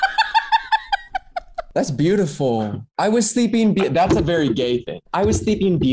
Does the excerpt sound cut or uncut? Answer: cut